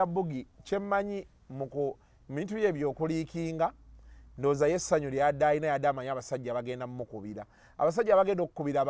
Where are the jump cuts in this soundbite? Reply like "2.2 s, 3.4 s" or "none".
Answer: none